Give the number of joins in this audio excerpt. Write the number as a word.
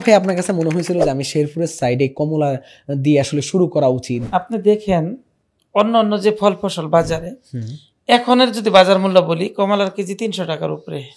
one